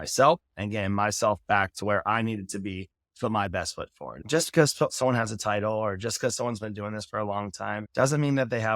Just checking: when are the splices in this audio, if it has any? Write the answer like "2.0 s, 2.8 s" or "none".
4.1 s, 7.9 s